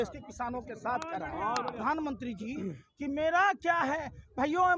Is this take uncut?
no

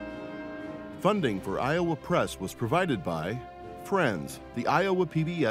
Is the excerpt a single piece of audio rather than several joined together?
no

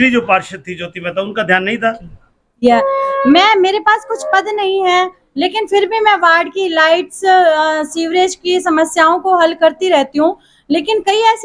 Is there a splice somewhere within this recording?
yes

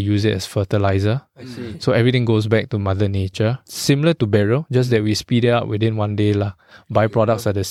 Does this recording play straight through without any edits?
no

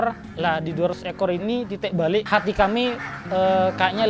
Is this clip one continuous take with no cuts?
no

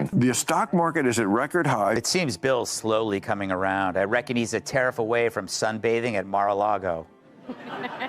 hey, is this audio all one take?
no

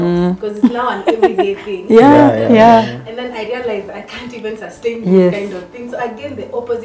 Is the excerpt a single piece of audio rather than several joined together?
yes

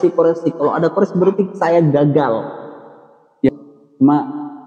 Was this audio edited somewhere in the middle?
yes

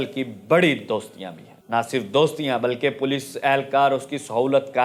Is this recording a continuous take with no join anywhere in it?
yes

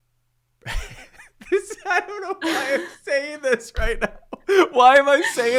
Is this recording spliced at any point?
no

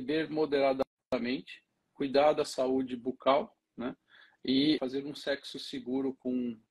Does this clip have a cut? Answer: yes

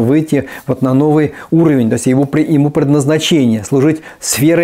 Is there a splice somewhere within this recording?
no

